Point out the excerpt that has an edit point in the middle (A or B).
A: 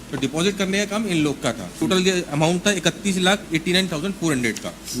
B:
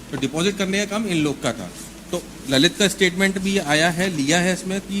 A